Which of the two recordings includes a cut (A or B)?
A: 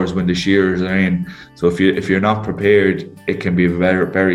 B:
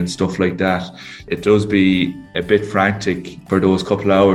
B